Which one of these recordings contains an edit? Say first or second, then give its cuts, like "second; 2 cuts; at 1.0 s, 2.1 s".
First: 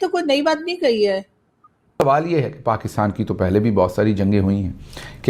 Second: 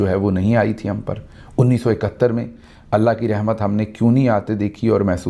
first; 1 cut; at 2.0 s